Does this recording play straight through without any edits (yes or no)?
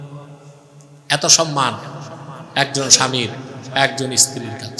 yes